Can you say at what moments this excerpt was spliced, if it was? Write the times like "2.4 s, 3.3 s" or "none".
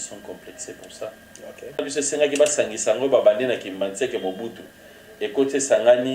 1.9 s